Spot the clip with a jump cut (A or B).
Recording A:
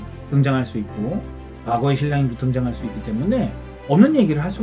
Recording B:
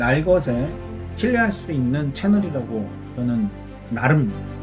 B